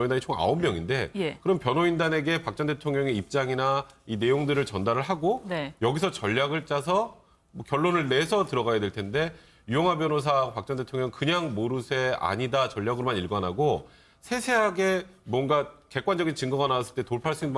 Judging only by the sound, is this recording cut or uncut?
cut